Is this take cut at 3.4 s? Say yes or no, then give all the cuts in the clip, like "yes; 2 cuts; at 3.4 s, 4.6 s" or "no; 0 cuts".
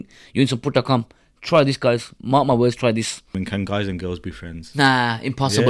yes; 1 cut; at 3.4 s